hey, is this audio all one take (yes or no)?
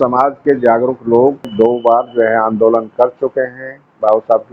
no